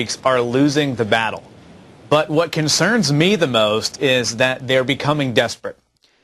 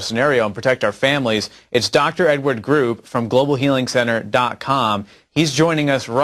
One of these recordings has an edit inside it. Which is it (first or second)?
first